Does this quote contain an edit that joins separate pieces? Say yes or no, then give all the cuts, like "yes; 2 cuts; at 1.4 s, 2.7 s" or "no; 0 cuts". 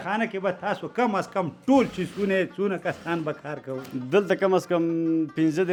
no; 0 cuts